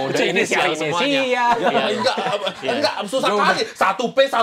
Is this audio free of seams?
yes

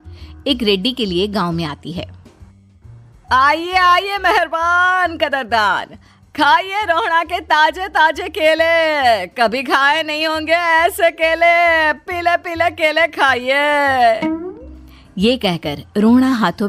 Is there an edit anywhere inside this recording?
no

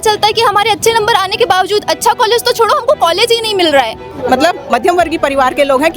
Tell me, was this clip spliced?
yes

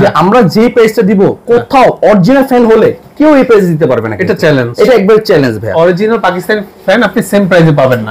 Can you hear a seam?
no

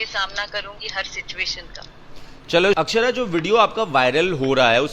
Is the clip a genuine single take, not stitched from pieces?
no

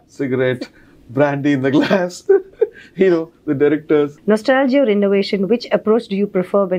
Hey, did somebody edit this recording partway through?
yes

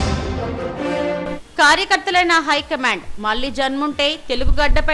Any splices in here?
yes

